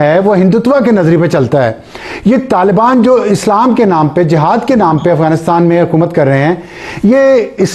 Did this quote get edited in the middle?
no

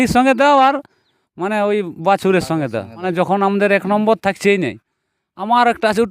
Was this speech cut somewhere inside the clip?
yes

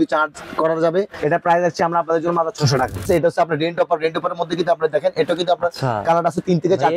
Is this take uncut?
no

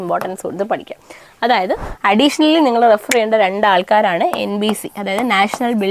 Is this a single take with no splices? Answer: no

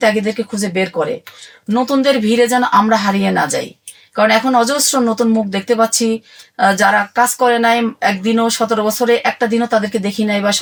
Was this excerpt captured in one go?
yes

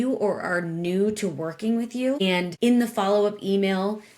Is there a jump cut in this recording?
yes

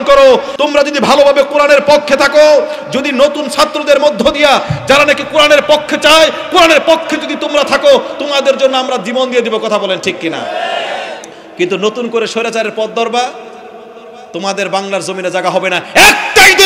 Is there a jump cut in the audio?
no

